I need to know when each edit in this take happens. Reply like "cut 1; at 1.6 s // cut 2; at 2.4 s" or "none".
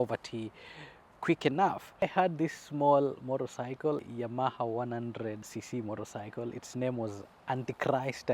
cut 1; at 2.0 s // cut 2; at 4.0 s // cut 3; at 5.5 s